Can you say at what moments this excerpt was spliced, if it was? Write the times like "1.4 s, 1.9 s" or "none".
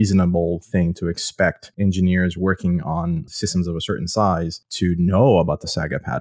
1.7 s, 3.3 s, 4.6 s